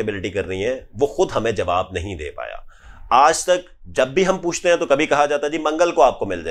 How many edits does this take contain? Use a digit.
0